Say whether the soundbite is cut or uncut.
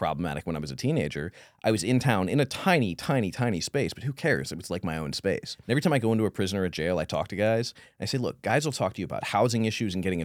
cut